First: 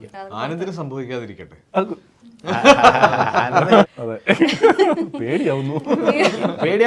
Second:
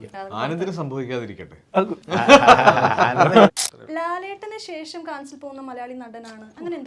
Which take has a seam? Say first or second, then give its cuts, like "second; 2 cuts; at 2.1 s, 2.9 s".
second; 2 cuts; at 2.0 s, 3.7 s